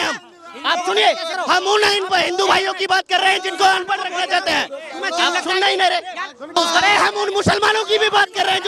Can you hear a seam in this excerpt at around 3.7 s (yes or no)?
no